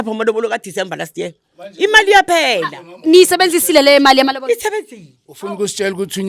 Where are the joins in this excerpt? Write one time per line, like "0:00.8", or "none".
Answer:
none